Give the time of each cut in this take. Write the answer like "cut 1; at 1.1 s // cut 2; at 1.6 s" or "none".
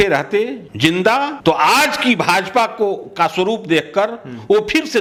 none

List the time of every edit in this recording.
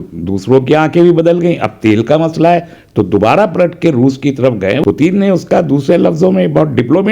cut 1; at 4.8 s

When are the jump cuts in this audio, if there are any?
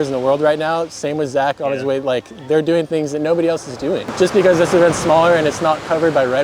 cut 1; at 4.1 s

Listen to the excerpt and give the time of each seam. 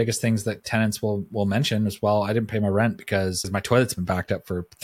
cut 1; at 3.5 s

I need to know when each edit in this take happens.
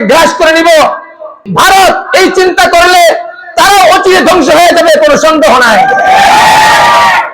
cut 1; at 1.5 s

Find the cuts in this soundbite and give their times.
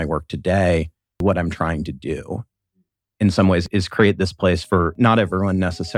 cut 1; at 1.2 s

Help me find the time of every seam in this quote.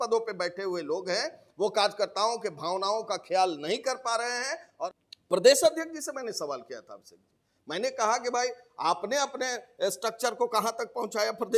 cut 1; at 4.7 s

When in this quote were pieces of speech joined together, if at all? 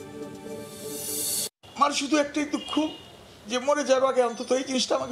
cut 1; at 1.4 s

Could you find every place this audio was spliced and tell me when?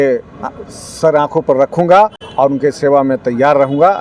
none

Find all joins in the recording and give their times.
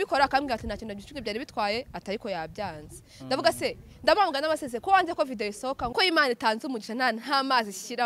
cut 1; at 5.9 s

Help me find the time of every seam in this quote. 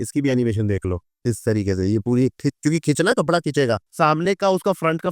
cut 1; at 3.9 s

